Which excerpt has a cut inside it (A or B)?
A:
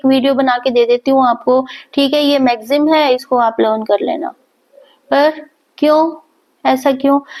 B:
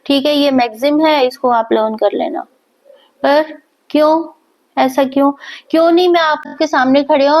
B